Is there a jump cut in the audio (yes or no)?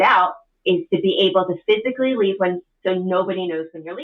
no